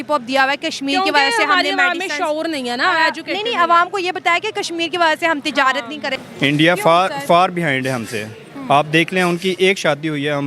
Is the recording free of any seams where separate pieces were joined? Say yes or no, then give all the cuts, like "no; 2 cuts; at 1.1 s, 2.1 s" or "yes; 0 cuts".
no; 1 cut; at 6.1 s